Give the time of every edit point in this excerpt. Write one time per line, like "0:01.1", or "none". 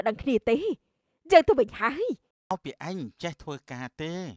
0:02.5